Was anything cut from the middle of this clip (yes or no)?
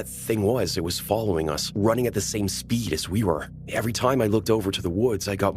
no